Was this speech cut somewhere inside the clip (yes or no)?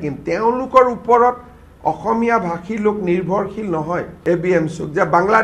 yes